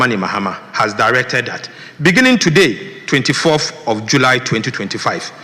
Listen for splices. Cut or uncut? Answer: uncut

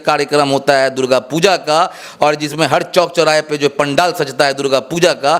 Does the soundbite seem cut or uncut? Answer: uncut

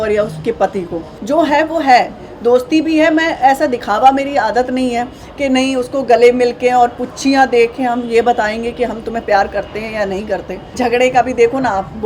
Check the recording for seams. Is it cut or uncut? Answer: cut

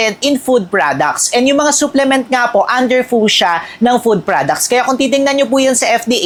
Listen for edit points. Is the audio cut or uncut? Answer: uncut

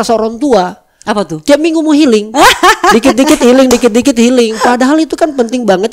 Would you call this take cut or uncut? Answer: uncut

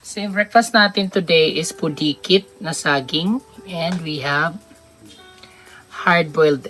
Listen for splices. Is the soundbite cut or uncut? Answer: uncut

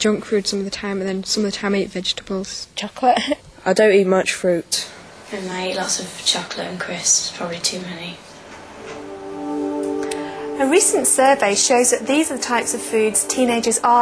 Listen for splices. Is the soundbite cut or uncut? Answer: cut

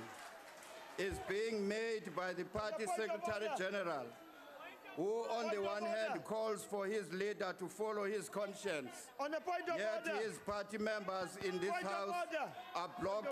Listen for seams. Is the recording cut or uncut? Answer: uncut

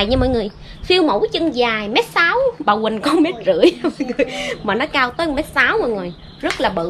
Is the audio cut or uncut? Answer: uncut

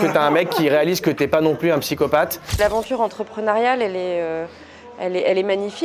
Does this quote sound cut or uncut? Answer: cut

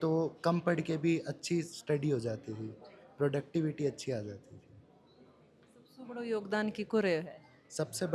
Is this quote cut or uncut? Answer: uncut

